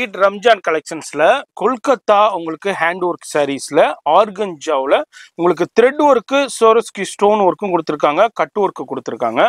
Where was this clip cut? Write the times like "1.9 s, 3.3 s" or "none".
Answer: none